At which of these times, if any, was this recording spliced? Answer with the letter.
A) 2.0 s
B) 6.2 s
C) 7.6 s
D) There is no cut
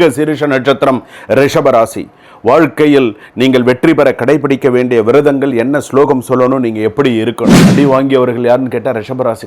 C